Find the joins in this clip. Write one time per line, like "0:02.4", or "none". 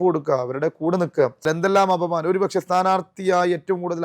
0:01.4